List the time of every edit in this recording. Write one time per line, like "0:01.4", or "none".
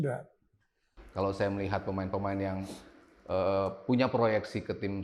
0:01.0